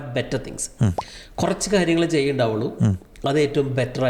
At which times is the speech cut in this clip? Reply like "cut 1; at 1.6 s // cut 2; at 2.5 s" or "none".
none